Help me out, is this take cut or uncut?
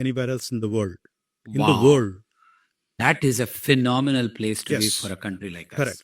uncut